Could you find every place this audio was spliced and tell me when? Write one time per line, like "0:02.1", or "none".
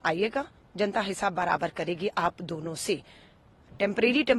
none